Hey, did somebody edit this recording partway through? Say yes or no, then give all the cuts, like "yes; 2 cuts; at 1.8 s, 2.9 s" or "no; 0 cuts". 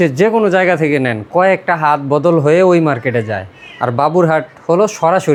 no; 0 cuts